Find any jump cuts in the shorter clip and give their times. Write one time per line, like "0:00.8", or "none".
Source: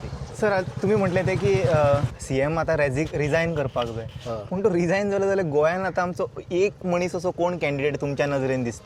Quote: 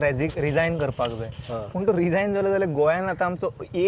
none